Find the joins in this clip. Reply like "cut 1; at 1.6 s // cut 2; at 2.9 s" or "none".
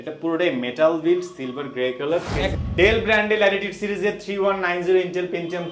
cut 1; at 2.6 s